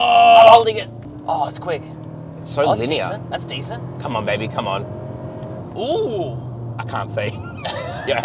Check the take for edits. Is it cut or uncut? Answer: cut